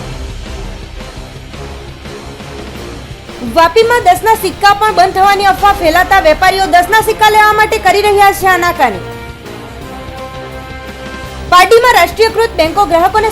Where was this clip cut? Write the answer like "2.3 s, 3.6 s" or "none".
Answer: 3.4 s